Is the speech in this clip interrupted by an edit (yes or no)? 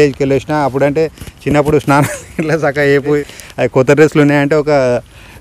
yes